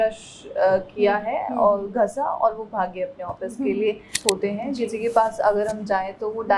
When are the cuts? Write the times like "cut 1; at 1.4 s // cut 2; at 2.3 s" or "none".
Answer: cut 1; at 4.1 s